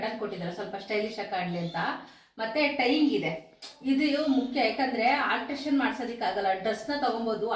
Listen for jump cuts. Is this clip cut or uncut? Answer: uncut